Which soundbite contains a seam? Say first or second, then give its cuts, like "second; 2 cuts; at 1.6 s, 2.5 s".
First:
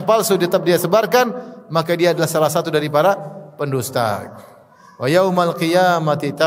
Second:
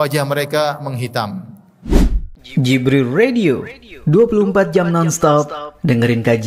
second; 1 cut; at 1.7 s